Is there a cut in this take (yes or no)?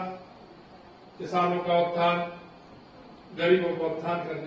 no